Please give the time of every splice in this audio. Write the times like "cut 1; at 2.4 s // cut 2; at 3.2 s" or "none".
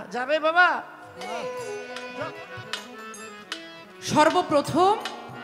cut 1; at 1.4 s